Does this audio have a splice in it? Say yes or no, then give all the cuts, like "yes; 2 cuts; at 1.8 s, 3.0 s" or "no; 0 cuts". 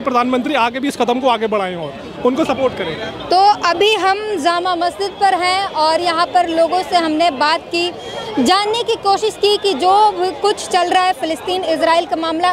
no; 0 cuts